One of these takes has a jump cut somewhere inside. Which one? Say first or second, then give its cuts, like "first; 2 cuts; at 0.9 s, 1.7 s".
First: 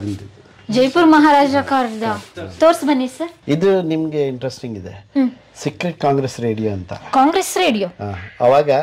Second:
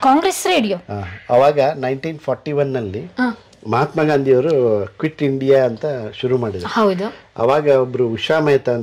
first; 1 cut; at 3.3 s